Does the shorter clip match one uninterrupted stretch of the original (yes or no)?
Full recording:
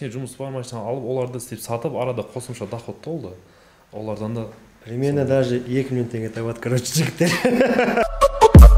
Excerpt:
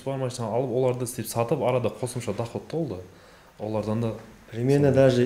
yes